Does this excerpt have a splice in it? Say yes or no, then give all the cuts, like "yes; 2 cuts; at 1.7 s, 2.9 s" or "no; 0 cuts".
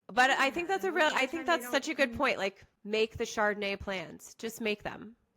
yes; 1 cut; at 2.7 s